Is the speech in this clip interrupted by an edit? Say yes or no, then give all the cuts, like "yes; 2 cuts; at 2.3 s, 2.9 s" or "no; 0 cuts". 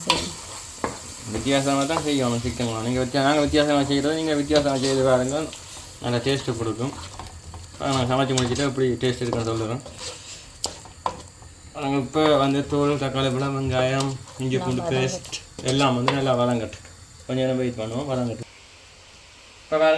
no; 0 cuts